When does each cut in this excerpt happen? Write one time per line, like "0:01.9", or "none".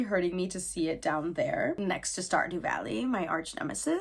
0:01.8